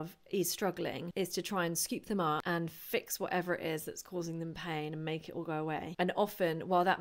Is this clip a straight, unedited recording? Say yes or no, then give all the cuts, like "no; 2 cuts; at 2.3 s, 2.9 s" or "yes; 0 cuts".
no; 3 cuts; at 1.0 s, 2.4 s, 5.9 s